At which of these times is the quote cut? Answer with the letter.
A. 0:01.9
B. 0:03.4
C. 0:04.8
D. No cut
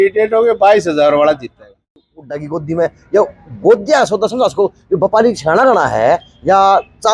A